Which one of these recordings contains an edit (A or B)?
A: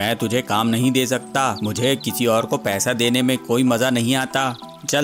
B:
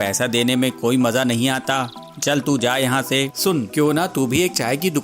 B